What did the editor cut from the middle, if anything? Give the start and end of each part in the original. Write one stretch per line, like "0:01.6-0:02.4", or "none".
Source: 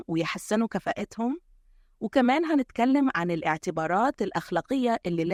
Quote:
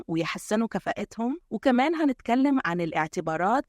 0:01.5-0:02.0